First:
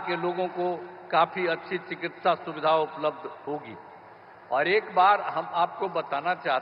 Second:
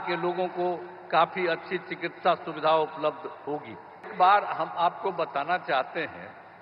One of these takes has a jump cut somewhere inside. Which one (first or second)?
second